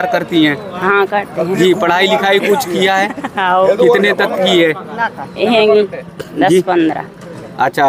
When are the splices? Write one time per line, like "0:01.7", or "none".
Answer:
none

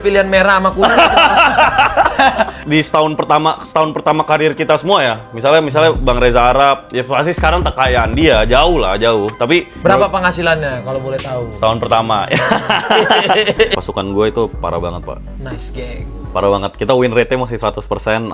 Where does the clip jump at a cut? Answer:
0:02.6
0:09.7
0:13.7

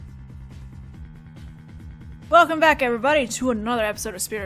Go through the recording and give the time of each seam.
none

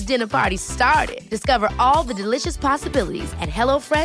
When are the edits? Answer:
none

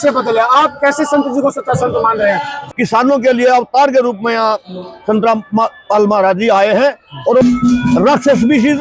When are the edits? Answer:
0:02.6
0:07.4

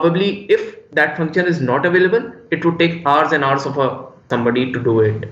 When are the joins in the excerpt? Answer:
0:04.2

